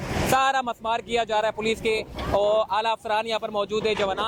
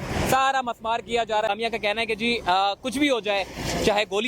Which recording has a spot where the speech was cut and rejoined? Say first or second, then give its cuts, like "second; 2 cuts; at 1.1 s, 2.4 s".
second; 1 cut; at 1.5 s